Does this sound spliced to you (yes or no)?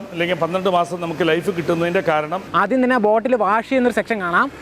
yes